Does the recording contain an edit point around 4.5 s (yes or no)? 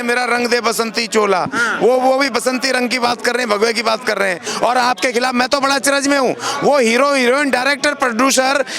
yes